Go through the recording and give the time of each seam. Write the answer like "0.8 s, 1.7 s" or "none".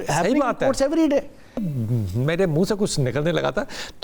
1.7 s